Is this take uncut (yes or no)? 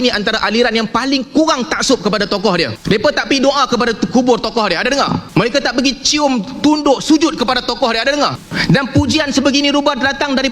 no